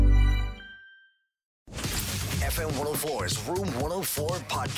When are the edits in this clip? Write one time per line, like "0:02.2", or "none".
0:01.6